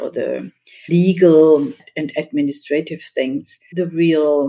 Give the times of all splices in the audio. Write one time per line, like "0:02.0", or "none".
0:03.6